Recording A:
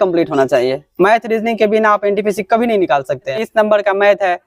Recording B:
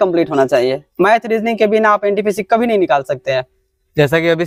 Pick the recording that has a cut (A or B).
A